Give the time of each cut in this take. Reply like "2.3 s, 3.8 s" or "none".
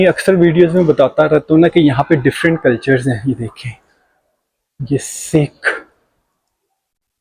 none